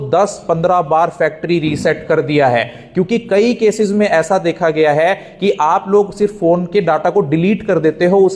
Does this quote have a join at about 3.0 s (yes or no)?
no